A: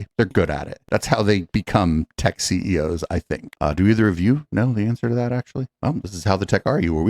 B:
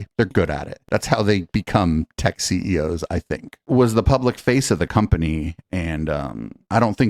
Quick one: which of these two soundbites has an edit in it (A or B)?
A